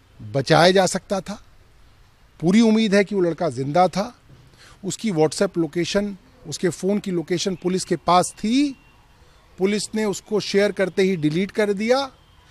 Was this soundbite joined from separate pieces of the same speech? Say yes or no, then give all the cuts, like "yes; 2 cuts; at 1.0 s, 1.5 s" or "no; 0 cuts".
no; 0 cuts